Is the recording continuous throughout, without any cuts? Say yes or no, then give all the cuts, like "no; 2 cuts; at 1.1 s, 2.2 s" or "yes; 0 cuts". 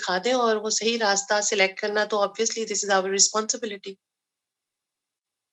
yes; 0 cuts